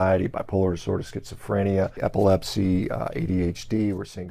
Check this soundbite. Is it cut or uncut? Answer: cut